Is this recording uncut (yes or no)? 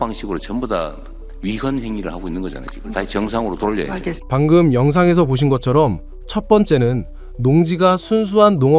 yes